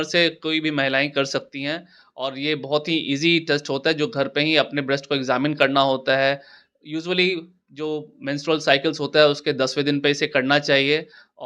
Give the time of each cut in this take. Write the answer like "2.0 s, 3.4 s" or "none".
none